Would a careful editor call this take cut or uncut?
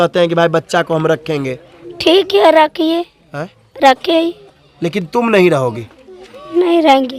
uncut